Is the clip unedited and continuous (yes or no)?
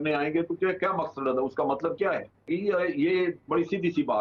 no